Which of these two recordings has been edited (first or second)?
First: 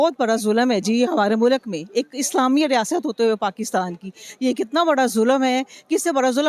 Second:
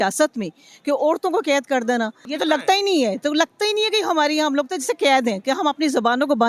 second